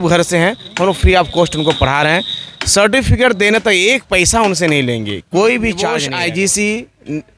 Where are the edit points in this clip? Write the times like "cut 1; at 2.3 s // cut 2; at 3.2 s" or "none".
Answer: cut 1; at 6.0 s